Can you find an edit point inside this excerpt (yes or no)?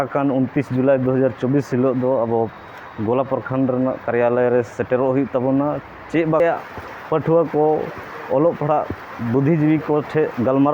yes